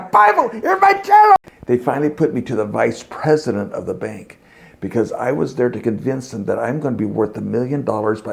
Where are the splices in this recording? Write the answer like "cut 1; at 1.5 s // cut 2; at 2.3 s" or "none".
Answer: cut 1; at 1.4 s